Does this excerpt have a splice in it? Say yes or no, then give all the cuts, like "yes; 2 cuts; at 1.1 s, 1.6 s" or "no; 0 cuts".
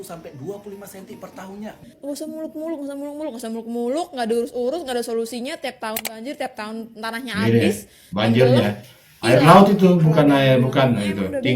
yes; 1 cut; at 1.8 s